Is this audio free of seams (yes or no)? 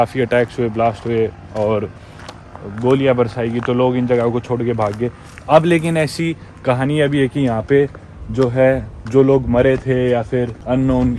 yes